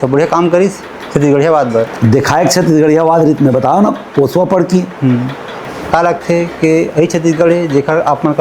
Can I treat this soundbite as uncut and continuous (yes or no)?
no